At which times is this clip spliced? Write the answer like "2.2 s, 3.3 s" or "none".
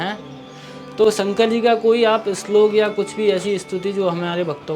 none